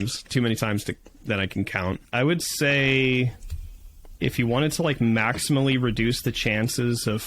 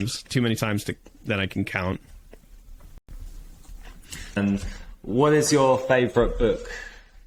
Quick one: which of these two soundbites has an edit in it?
first; 1 cut; at 2.0 s

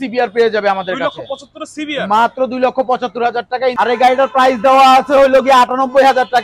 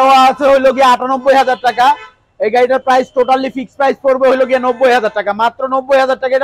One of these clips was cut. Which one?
first; 1 cut; at 3.8 s

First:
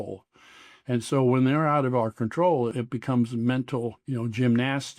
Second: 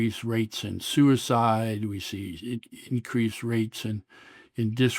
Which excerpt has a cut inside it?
first; 1 cut; at 4.0 s

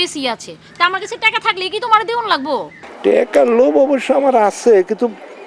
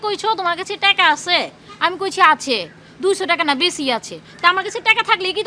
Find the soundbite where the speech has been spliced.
first; 1 cut; at 2.8 s

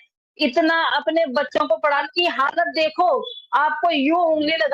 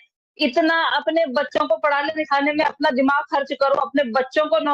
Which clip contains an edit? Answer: first; 1 cut; at 2.1 s

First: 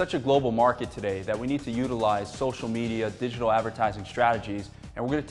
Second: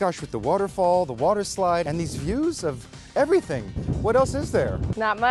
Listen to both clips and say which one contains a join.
second; 2 cuts; at 1.9 s, 3.7 s

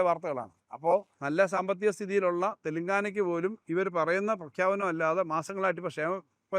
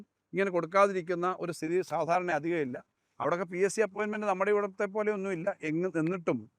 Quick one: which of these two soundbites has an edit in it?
first; 1 cut; at 1.2 s

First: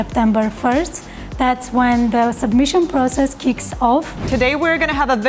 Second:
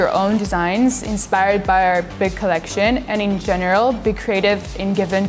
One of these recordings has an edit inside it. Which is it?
first; 1 cut; at 4.3 s

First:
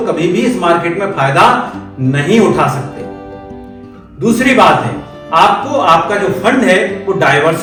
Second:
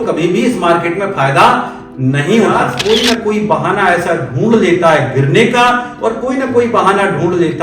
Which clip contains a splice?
second; 1 cut; at 2.7 s

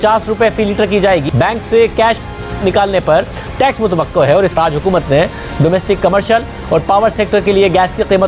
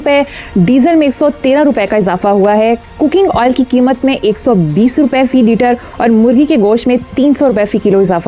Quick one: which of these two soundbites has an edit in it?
first; 2 cuts; at 1.3 s, 4.6 s

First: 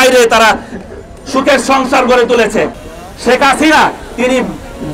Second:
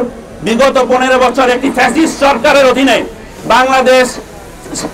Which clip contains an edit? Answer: first; 1 cut; at 2.8 s

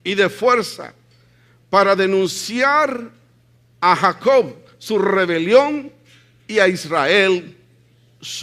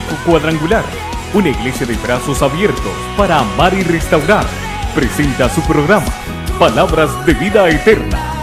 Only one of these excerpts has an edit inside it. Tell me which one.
first; 1 cut; at 3.1 s

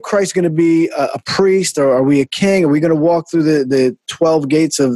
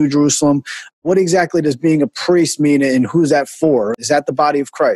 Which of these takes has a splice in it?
second; 2 cuts; at 1.0 s, 3.9 s

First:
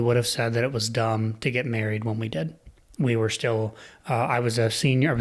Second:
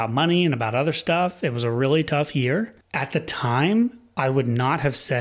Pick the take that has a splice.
second; 1 cut; at 2.8 s

